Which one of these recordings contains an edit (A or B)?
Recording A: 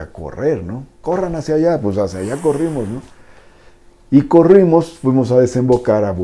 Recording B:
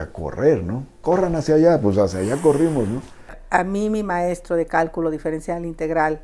B